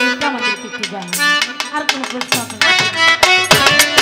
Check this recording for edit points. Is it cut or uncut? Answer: uncut